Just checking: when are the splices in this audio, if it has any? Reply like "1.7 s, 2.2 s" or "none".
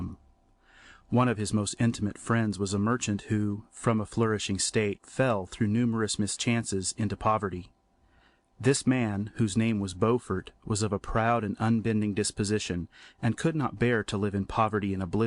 12.3 s